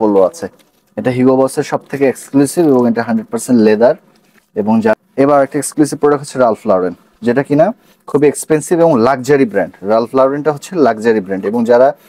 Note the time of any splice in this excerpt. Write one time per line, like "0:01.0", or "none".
0:04.9